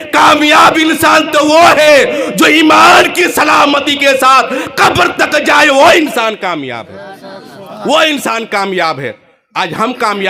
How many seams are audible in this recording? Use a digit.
0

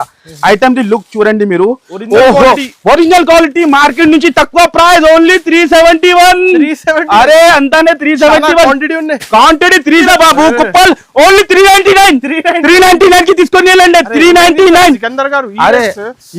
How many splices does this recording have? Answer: 1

